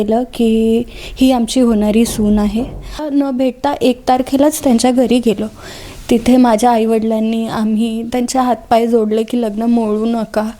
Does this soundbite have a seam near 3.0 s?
yes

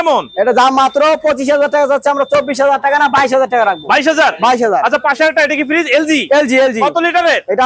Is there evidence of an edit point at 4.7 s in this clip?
no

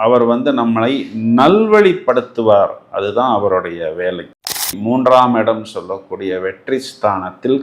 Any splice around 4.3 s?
yes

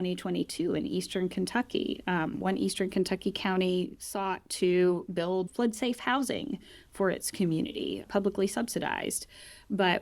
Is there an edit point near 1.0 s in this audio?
no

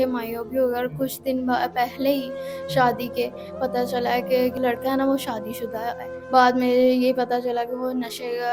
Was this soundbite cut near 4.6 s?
yes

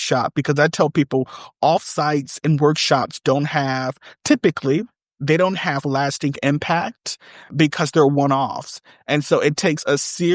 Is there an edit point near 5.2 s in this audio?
no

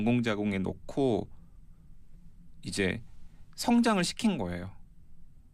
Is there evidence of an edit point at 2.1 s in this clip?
no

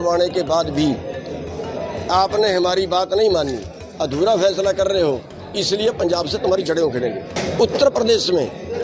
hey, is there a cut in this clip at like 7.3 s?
yes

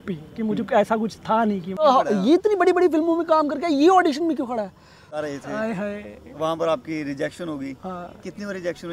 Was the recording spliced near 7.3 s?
no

